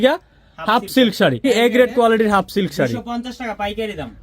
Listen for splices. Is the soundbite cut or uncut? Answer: cut